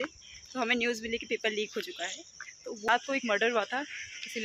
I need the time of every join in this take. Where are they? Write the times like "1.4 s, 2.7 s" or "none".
2.9 s